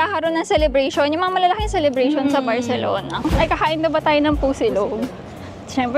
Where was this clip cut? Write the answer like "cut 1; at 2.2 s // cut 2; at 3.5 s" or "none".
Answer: cut 1; at 3.3 s